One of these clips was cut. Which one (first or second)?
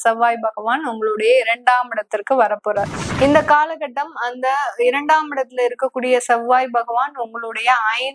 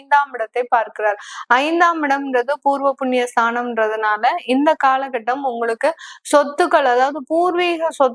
first